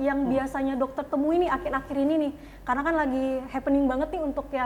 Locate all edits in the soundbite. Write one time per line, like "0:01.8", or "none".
none